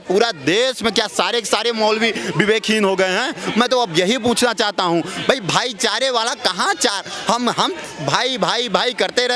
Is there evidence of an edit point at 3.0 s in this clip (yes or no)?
no